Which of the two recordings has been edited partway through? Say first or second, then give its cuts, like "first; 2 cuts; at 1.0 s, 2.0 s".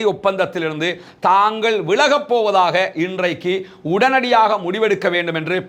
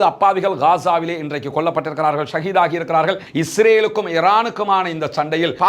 second; 1 cut; at 3.2 s